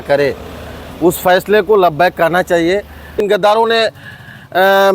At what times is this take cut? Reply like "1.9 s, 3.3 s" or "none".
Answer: 3.2 s